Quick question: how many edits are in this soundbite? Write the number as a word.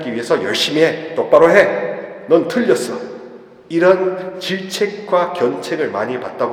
zero